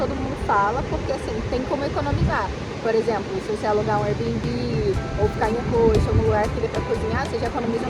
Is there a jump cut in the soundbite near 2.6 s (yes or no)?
no